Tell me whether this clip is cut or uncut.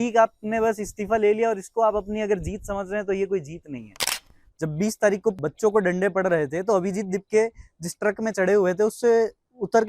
cut